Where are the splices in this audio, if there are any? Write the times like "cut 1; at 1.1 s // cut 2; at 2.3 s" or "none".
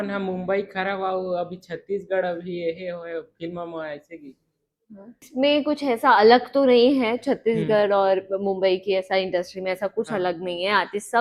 none